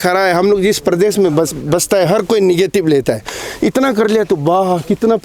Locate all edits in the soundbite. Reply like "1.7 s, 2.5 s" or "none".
none